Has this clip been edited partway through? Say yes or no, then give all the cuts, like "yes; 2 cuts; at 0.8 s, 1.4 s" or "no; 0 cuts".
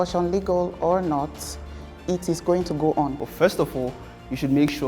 yes; 1 cut; at 3.2 s